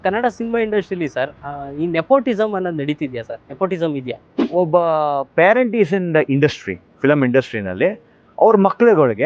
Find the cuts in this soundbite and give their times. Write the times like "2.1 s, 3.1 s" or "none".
4.3 s